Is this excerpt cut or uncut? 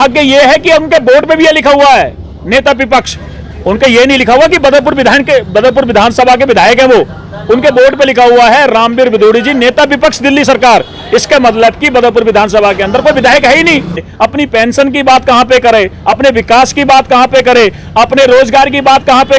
cut